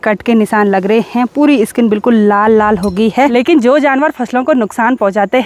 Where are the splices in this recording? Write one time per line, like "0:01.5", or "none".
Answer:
0:03.3